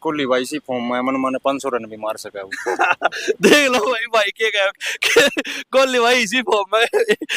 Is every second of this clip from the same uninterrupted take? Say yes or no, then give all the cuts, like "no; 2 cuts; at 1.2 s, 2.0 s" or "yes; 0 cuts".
yes; 0 cuts